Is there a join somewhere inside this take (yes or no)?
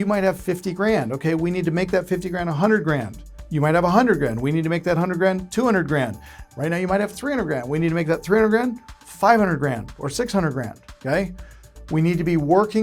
no